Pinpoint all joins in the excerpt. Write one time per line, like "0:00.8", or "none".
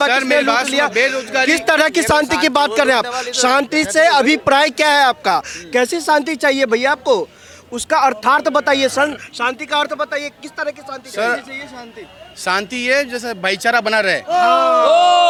none

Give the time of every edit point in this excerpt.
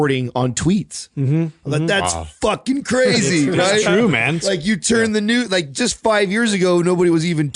none

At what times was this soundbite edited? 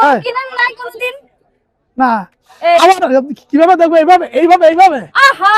none

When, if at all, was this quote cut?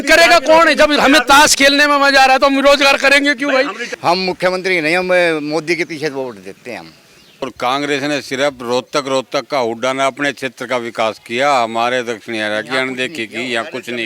0:03.8
0:07.4

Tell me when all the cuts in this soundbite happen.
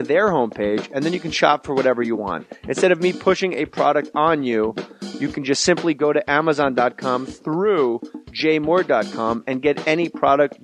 none

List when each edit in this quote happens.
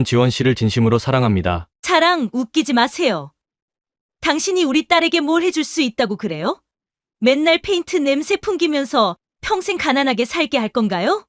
0:01.7

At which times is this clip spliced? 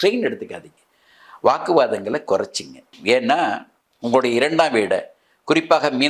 none

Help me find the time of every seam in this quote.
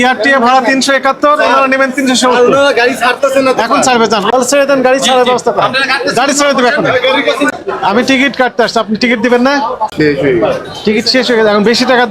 0:04.3
0:07.5
0:09.9

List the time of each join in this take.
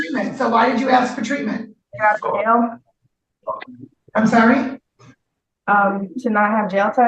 0:01.9

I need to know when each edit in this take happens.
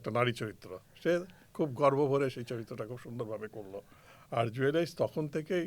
none

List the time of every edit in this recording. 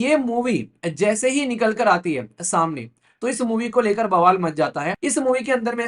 0:04.9

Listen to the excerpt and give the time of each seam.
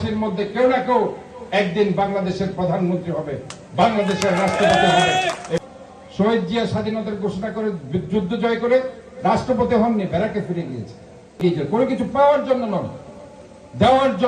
0:05.7
0:11.4

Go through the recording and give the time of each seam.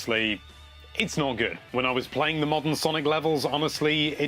0:01.6

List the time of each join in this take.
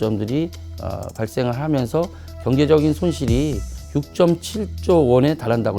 0:03.8

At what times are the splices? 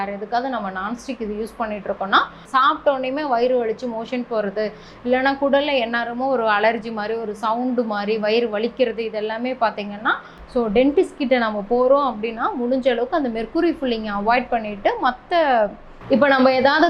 0:02.4
0:10.4
0:15.9

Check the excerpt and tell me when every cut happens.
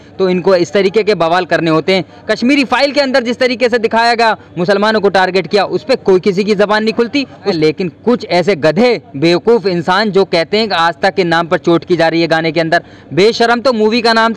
0:07.5

